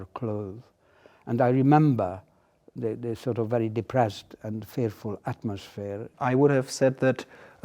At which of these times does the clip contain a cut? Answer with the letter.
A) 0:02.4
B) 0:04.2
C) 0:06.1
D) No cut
C